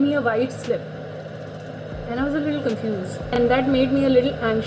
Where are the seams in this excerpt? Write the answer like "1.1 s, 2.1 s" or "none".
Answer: 3.4 s